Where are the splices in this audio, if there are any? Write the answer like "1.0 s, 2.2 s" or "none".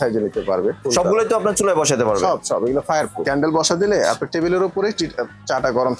0.8 s, 3.2 s